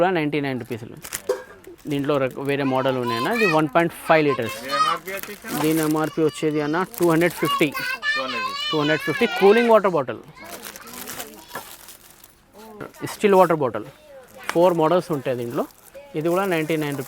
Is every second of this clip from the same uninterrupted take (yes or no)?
no